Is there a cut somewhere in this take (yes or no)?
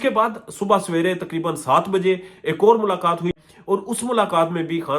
yes